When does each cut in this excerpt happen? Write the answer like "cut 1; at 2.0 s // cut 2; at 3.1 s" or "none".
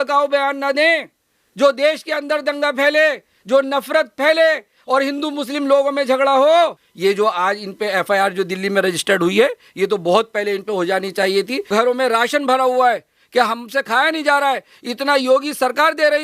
cut 1; at 6.8 s // cut 2; at 11.7 s